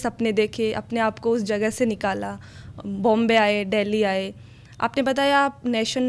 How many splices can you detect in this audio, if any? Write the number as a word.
zero